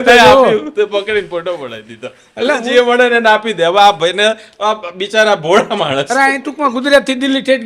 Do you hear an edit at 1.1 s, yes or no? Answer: no